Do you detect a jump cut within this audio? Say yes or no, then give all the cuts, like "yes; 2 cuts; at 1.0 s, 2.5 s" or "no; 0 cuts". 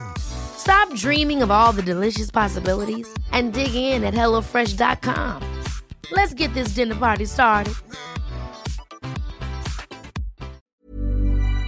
yes; 1 cut; at 10.6 s